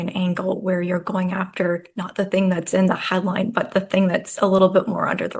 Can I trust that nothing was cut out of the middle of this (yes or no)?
yes